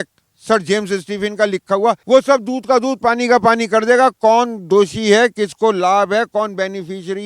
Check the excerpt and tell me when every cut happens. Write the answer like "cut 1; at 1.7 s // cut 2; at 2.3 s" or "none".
cut 1; at 2.0 s